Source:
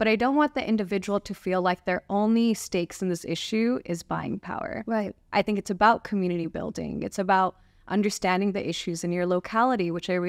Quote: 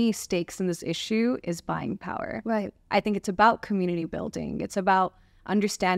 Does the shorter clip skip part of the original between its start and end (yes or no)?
no